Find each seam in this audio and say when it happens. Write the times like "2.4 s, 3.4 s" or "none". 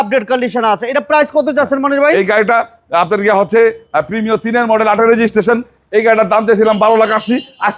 none